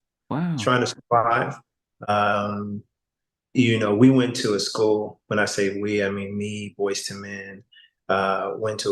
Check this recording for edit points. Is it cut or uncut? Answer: cut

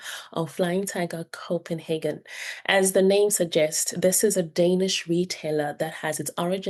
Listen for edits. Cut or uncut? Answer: uncut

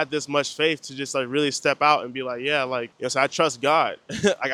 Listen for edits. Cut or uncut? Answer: uncut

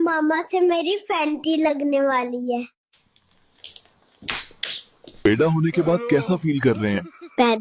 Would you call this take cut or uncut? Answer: cut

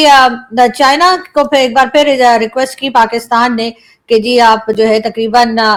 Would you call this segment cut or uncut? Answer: uncut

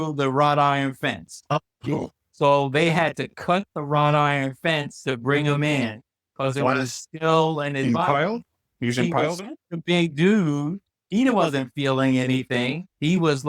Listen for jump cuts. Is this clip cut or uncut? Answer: uncut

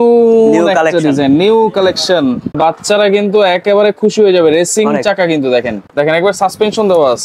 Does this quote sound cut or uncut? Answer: cut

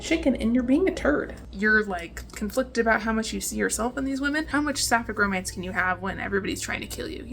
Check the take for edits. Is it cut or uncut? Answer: cut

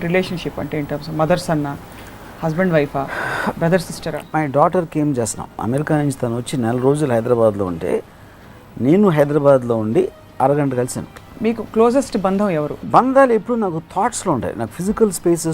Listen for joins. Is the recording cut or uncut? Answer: cut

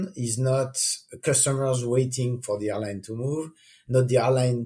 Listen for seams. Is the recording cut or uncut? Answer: uncut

